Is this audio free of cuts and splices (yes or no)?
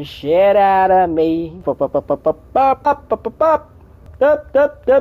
no